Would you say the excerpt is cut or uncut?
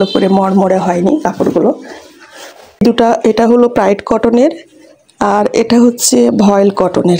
cut